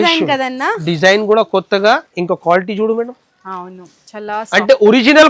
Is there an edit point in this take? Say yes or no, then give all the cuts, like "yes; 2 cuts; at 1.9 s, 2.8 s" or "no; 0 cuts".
no; 0 cuts